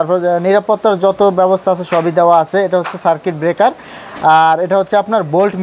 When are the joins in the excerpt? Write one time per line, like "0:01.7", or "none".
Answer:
none